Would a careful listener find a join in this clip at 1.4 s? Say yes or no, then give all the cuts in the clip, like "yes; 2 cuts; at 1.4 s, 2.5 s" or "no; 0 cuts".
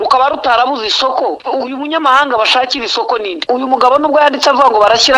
yes; 2 cuts; at 1.4 s, 3.4 s